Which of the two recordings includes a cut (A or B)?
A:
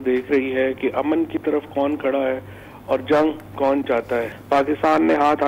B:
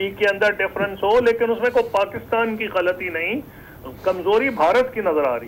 A